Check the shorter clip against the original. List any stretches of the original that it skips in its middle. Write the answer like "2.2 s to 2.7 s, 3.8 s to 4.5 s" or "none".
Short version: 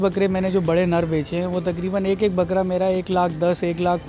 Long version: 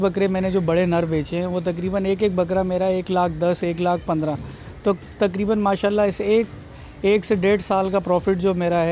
none